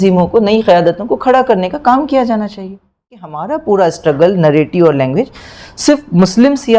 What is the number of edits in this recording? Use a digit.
1